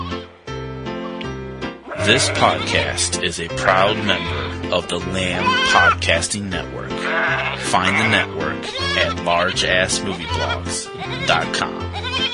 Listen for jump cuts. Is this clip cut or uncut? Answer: uncut